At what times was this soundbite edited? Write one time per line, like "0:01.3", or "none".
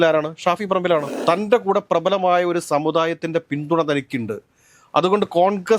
0:01.1